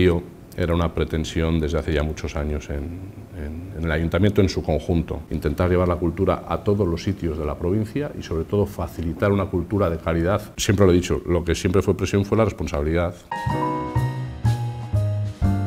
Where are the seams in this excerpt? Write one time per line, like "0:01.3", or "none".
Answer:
0:05.2
0:10.6
0:13.2

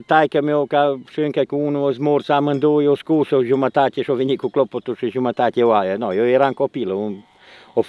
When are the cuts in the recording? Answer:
none

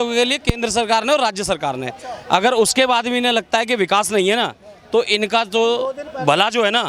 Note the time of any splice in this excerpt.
none

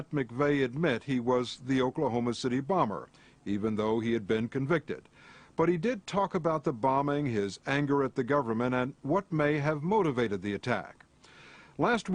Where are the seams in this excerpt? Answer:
none

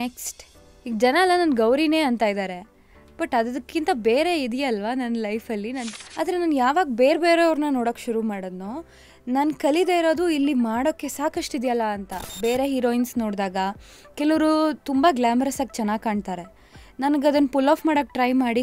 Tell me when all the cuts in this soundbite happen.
0:06.0
0:12.3

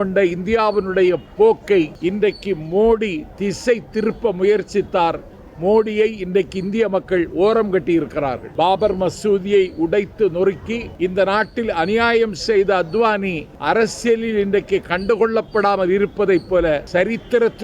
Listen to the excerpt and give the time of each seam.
0:01.9
0:08.4
0:10.9
0:13.5
0:16.9

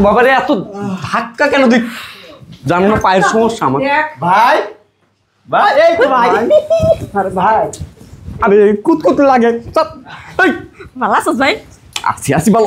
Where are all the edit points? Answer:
none

